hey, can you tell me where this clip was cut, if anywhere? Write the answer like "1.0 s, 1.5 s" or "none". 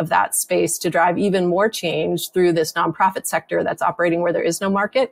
none